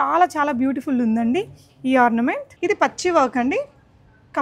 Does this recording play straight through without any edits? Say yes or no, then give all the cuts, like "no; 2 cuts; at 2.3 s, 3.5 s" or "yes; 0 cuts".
no; 1 cut; at 2.5 s